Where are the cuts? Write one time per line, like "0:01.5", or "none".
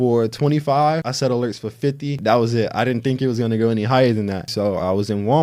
0:01.1
0:02.2
0:04.5